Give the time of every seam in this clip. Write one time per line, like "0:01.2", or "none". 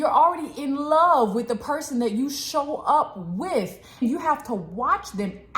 0:04.0